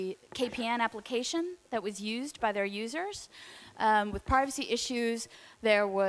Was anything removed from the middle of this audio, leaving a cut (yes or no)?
no